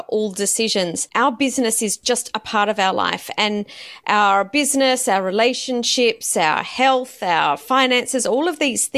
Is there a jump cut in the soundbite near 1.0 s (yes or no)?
yes